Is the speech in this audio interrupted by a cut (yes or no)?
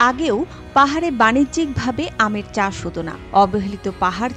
yes